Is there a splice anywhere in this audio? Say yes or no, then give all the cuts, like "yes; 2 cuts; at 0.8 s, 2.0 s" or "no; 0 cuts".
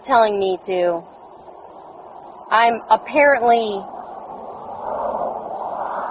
no; 0 cuts